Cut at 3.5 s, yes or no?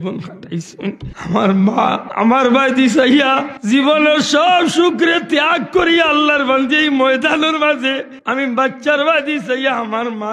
yes